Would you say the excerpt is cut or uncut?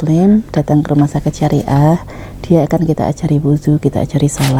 uncut